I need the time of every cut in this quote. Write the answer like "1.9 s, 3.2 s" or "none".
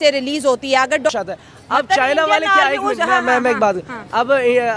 1.1 s